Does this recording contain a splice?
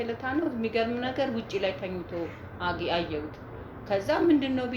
no; 0 cuts

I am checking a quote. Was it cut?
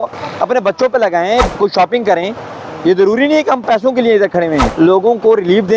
yes; 2 cuts; at 1.5 s, 4.7 s

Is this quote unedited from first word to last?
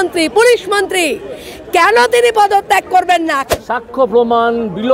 no; 1 cut; at 3.4 s

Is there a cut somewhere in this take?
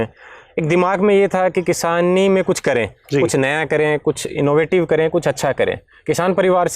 no; 0 cuts

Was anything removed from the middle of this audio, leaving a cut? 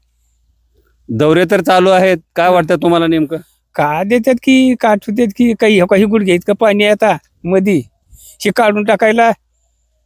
no; 0 cuts

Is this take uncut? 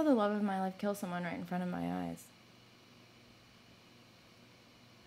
yes; 0 cuts

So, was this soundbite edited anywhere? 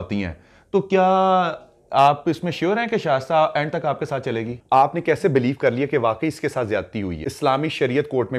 yes; 2 cuts; at 4.6 s, 7.2 s

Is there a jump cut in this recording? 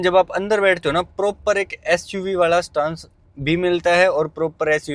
no; 0 cuts

